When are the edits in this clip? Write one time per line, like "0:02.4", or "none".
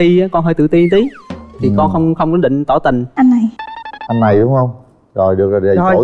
0:03.1

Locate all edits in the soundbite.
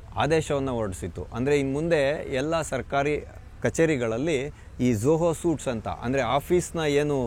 none

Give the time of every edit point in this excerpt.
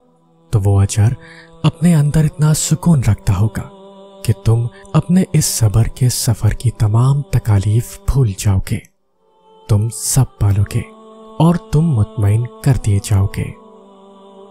0:13.6

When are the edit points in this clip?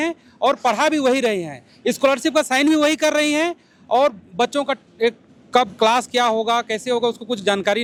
none

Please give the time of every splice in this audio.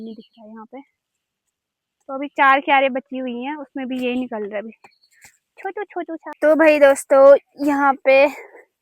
0:06.4

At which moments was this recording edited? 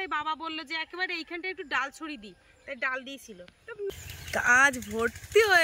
0:03.9

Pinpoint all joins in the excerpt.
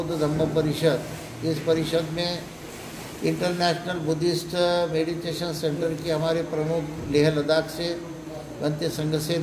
none

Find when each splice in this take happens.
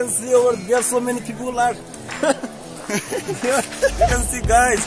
none

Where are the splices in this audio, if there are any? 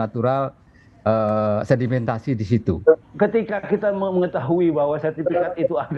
0:03.0

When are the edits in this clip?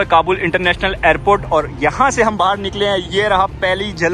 none

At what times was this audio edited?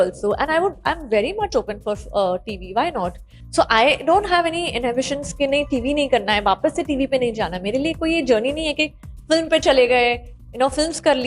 none

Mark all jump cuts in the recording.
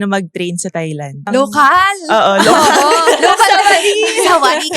0:01.3

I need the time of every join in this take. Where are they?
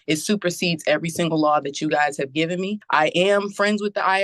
0:02.8

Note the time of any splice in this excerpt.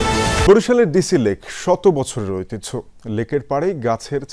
none

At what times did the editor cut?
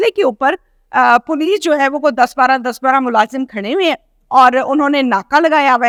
none

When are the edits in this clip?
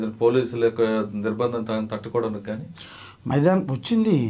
none

